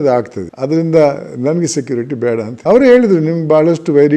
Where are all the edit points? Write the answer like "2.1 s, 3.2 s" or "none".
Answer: none